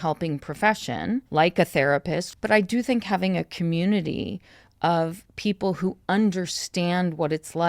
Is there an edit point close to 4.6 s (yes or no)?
no